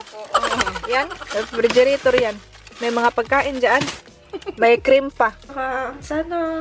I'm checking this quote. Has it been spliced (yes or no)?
yes